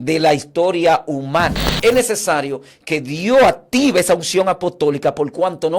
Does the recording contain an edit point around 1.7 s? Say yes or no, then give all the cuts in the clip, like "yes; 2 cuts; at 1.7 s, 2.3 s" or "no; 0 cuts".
yes; 1 cut; at 1.7 s